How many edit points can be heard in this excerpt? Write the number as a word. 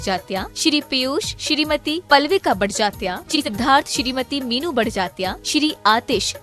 one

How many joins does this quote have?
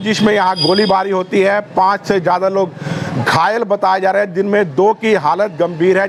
zero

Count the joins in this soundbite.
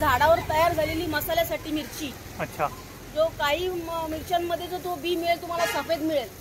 zero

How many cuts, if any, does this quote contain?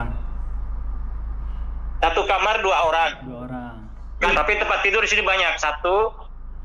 one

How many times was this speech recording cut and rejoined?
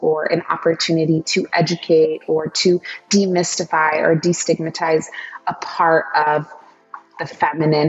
zero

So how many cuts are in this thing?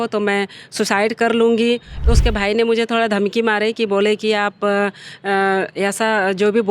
one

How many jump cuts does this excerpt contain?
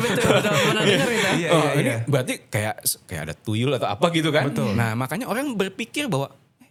zero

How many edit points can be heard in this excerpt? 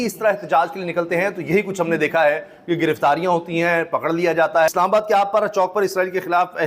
one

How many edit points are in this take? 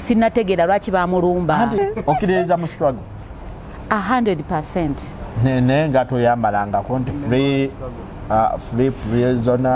one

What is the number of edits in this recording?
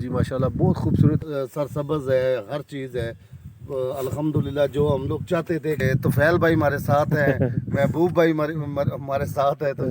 two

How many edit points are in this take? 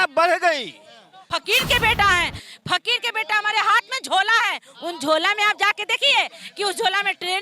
one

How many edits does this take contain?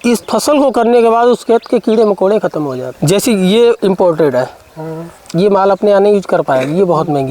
one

